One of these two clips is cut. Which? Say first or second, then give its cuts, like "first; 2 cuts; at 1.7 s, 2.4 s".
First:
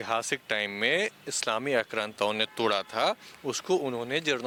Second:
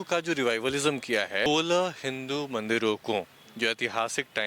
second; 1 cut; at 1.5 s